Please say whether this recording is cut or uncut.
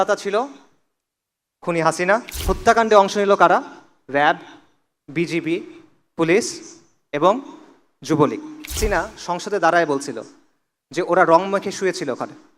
cut